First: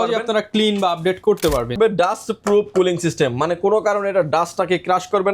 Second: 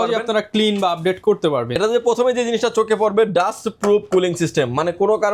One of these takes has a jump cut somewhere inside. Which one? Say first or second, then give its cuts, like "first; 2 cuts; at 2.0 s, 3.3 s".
first; 1 cut; at 1.8 s